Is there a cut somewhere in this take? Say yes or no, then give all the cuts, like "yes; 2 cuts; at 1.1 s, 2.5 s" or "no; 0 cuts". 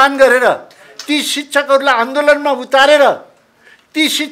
no; 0 cuts